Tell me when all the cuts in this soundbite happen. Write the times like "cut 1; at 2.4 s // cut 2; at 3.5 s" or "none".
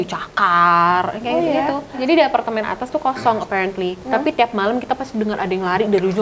cut 1; at 2.0 s